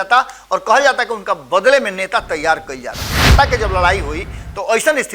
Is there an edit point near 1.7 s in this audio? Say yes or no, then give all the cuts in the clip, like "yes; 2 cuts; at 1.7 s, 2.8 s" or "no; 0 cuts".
no; 1 cut; at 3.2 s